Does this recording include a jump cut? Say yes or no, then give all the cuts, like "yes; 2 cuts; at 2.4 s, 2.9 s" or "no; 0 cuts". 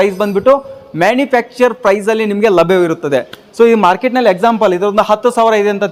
no; 0 cuts